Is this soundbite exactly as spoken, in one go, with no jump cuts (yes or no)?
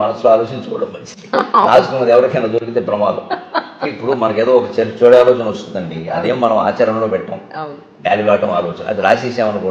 yes